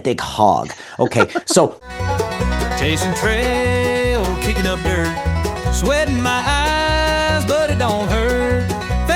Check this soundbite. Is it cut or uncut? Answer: cut